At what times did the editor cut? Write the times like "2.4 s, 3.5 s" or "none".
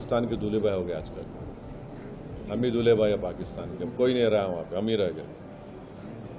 none